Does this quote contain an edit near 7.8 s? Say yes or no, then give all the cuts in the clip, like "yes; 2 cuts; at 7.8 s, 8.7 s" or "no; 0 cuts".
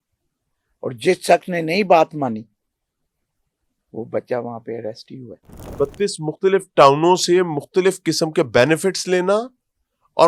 no; 1 cut; at 5.6 s